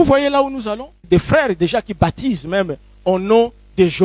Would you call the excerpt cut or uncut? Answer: cut